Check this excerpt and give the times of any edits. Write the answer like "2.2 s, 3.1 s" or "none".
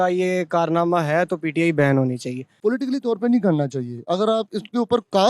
2.4 s